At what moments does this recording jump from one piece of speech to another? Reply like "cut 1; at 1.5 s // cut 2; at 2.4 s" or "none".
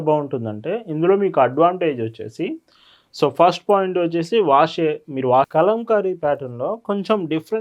cut 1; at 5.5 s